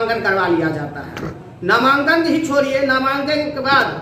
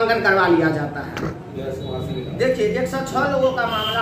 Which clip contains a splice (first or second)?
second